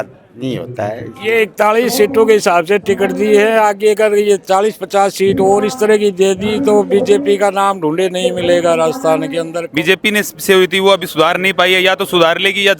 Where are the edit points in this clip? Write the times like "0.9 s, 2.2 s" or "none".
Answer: 1.1 s, 9.6 s